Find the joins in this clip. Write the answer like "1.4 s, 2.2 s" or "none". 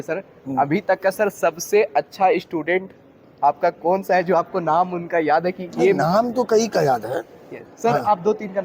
none